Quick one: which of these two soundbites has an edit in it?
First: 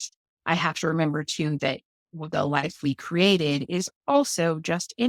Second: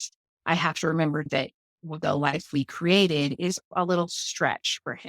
second; 2 cuts; at 1.3 s, 3.7 s

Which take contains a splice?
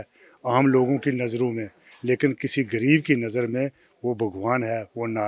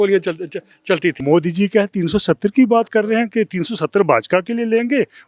second; 1 cut; at 1.2 s

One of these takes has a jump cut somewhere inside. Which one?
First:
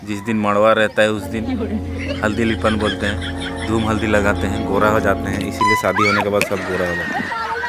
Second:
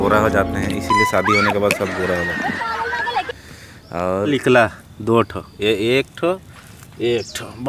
second; 1 cut; at 4.3 s

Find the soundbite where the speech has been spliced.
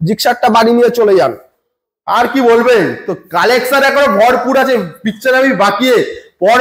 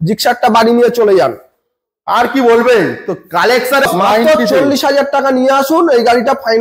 second; 1 cut; at 3.9 s

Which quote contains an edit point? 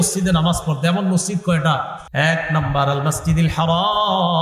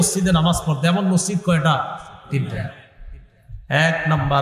first; 1 cut; at 2.0 s

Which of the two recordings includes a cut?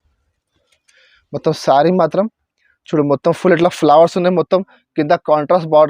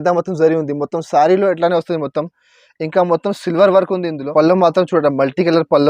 second; 1 cut; at 4.2 s

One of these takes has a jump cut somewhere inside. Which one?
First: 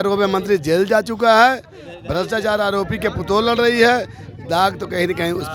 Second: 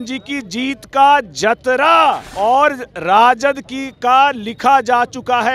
second; 1 cut; at 2.3 s

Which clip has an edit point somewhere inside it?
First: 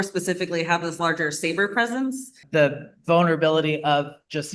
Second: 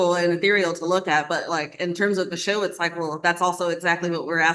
first; 1 cut; at 2.4 s

